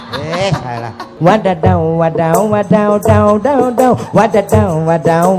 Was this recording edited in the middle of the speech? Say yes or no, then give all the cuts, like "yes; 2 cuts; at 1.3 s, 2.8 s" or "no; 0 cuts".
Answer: yes; 1 cut; at 1.1 s